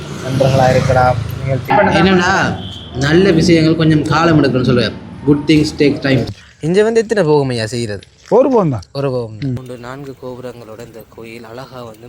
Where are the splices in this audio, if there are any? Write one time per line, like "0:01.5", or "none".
0:01.7
0:06.4
0:09.6